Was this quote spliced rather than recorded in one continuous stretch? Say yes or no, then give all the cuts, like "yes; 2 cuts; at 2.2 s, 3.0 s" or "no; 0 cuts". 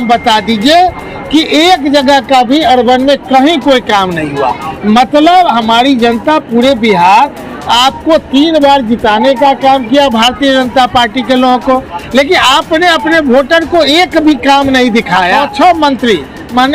yes; 1 cut; at 15.3 s